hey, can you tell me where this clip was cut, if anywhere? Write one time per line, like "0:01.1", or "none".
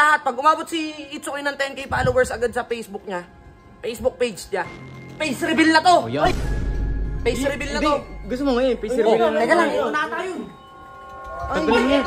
none